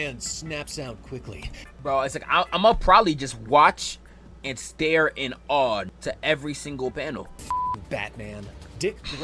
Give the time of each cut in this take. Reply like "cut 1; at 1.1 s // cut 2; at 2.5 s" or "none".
cut 1; at 1.6 s // cut 2; at 5.9 s // cut 3; at 7.3 s